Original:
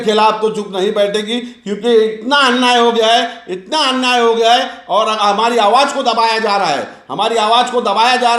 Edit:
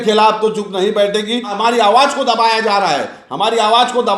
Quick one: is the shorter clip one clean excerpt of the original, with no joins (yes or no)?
no